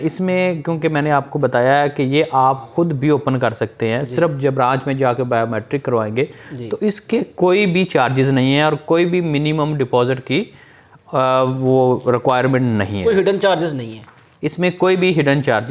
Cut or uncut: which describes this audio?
uncut